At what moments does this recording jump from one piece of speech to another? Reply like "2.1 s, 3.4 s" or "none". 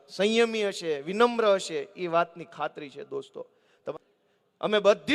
3.9 s